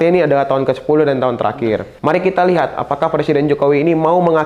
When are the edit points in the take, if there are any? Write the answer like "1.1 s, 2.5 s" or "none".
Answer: 1.9 s